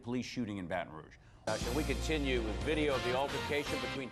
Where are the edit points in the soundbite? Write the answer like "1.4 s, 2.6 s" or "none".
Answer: 1.4 s